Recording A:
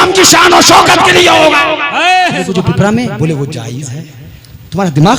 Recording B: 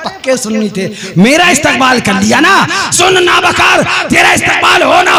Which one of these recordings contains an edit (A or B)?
A